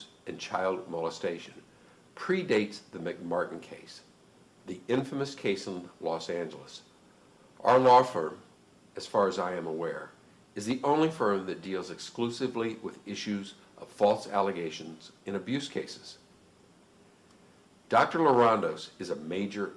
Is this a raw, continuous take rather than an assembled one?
no; 1 cut; at 14.0 s

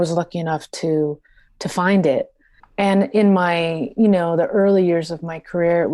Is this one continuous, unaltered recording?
yes; 0 cuts

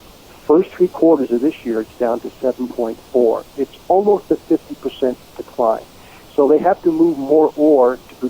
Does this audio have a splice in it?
no; 0 cuts

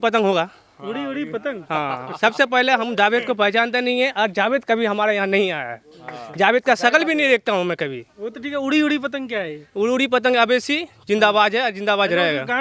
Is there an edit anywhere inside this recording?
no; 0 cuts

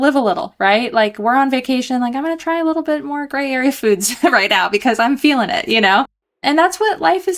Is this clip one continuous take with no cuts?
no; 1 cut; at 6.4 s

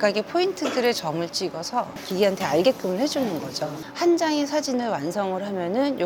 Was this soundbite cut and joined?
yes; 2 cuts; at 2.0 s, 3.8 s

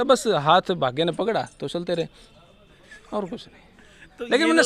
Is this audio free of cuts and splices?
yes; 0 cuts

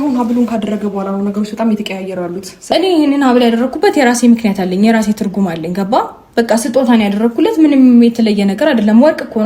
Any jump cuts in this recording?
yes; 1 cut; at 2.6 s

